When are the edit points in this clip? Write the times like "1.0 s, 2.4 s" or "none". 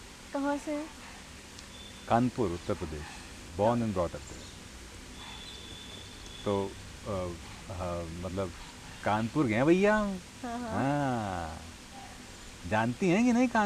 none